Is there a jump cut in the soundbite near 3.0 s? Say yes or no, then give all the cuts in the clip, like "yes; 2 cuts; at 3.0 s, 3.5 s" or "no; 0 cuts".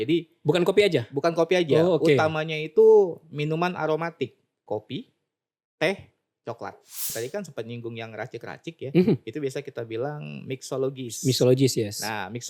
no; 2 cuts; at 4.6 s, 7.1 s